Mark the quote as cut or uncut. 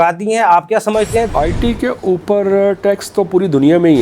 cut